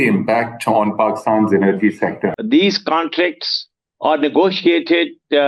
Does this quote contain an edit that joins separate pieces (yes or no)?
yes